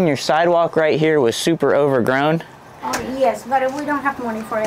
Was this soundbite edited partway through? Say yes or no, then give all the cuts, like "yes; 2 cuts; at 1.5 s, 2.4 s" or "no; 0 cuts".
no; 0 cuts